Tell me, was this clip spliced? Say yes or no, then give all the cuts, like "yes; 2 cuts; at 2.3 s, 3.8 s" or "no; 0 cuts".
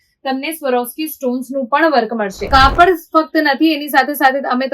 yes; 1 cut; at 2.4 s